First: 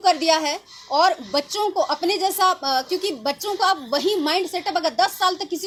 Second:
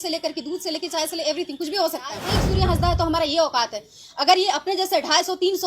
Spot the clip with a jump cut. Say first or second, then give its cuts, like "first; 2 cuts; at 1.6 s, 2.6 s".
second; 1 cut; at 2.3 s